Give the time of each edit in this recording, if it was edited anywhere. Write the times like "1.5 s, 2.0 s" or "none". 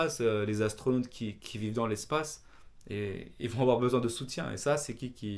none